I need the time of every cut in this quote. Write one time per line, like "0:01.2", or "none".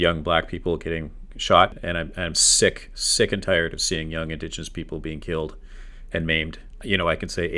0:01.8
0:06.7